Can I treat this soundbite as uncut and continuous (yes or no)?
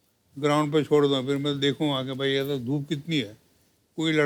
yes